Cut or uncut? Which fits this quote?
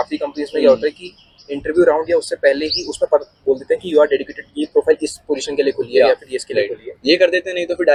uncut